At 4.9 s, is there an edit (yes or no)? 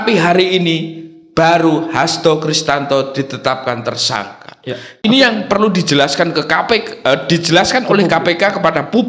yes